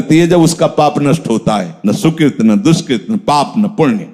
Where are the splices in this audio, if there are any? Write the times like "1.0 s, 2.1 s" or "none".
1.7 s